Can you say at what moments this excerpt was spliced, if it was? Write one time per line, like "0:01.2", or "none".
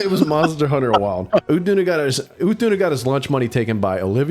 0:01.4